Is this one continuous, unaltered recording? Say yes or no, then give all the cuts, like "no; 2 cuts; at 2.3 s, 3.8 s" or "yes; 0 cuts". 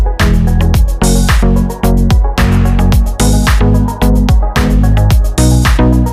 yes; 0 cuts